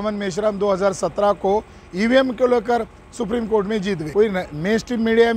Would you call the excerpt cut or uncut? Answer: cut